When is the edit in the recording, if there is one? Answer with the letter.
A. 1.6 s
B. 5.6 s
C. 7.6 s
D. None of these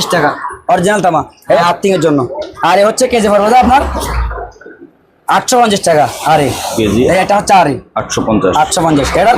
A